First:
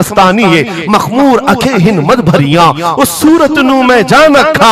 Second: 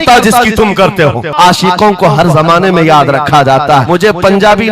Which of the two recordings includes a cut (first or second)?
second